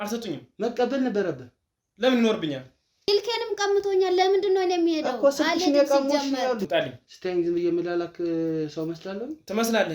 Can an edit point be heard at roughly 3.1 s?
yes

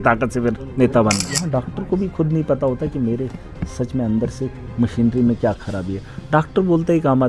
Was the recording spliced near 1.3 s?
yes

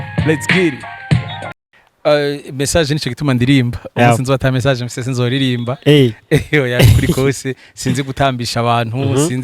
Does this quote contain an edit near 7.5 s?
no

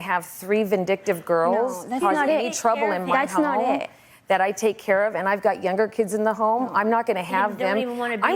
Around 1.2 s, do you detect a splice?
no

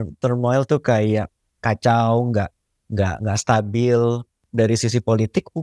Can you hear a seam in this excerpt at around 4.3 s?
yes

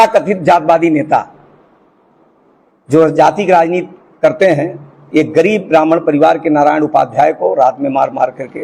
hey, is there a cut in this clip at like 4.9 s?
yes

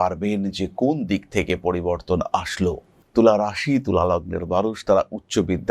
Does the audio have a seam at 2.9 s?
yes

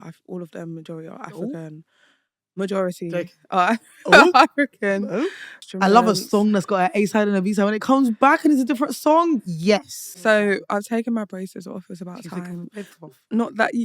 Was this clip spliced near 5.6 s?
yes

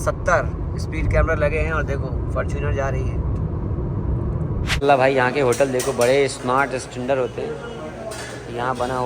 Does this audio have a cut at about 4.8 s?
yes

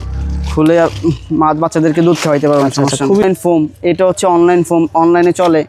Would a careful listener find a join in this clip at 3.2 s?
yes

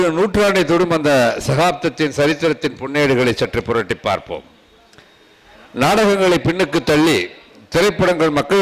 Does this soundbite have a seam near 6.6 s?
no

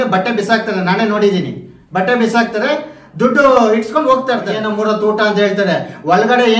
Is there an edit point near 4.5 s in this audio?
yes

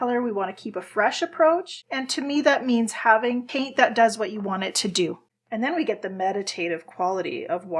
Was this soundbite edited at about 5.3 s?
yes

